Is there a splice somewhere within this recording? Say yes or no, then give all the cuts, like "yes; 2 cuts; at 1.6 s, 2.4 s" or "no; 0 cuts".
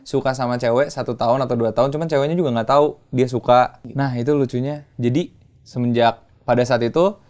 yes; 1 cut; at 3.9 s